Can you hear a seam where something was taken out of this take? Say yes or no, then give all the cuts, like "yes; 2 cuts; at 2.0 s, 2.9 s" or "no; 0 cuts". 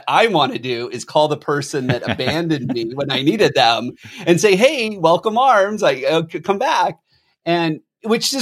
no; 0 cuts